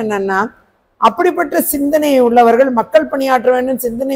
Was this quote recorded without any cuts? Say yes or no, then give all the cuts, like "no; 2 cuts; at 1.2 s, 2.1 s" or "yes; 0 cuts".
yes; 0 cuts